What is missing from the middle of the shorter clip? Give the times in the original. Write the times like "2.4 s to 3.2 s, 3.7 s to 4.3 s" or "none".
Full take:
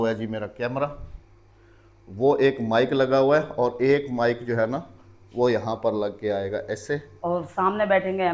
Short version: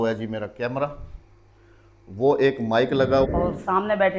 3.3 s to 7.2 s